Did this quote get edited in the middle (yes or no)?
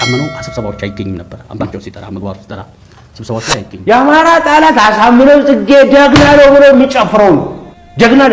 yes